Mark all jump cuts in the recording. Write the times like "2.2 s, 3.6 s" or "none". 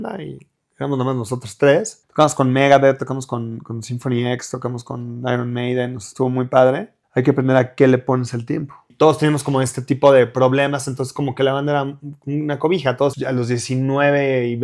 2.0 s, 6.9 s, 8.9 s, 13.1 s